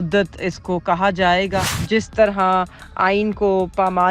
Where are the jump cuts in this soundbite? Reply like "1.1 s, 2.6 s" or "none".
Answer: 1.8 s